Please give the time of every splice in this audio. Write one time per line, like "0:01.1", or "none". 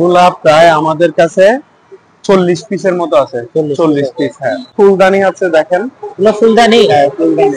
0:04.7

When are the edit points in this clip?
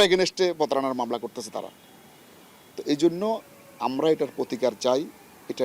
none

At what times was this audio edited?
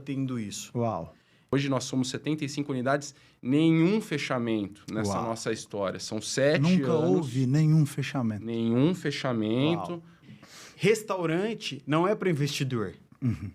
0:01.5
0:10.2

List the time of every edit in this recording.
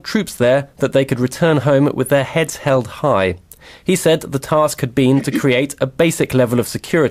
none

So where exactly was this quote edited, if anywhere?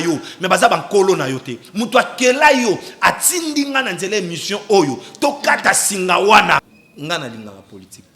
0:06.7

